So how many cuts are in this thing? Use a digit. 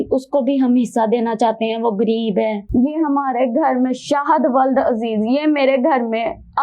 1